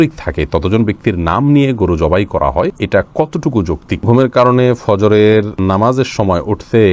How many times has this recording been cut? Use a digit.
3